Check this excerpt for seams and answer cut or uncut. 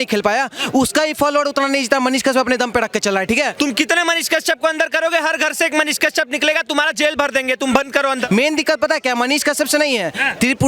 cut